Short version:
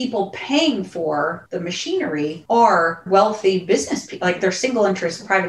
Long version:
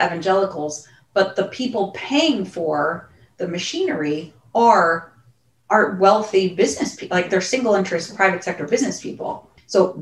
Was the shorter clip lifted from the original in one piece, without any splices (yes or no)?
no